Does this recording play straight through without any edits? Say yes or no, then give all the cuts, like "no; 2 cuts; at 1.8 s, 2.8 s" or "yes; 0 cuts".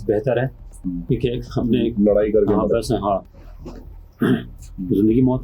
yes; 0 cuts